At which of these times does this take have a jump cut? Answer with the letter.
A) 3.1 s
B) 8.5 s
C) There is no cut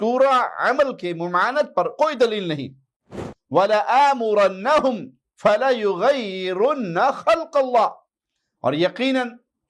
A